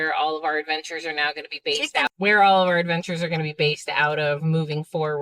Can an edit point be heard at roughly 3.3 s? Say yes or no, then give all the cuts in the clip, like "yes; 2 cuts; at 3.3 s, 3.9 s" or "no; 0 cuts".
no; 1 cut; at 2.1 s